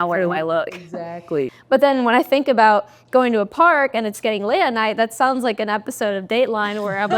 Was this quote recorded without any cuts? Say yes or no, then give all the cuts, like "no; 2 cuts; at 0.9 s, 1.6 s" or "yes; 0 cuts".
no; 1 cut; at 1.6 s